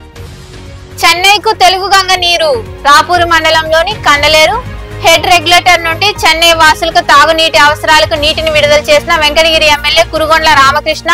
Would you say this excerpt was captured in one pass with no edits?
no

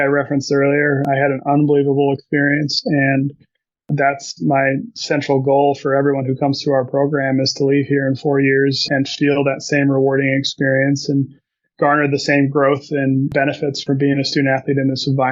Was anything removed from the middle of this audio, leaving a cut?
yes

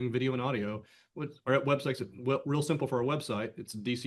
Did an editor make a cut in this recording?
no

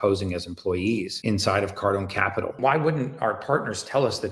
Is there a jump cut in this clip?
yes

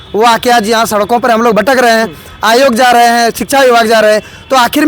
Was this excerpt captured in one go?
yes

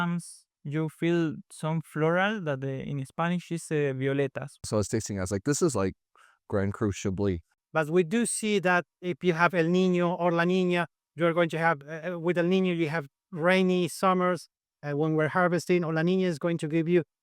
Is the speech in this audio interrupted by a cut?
yes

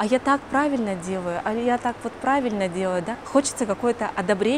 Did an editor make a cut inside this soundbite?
yes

